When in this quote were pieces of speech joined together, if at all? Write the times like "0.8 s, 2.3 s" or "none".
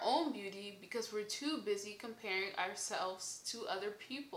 none